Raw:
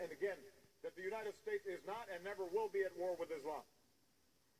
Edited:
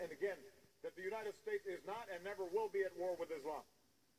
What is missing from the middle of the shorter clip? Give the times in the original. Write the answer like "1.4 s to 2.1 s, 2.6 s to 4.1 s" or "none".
none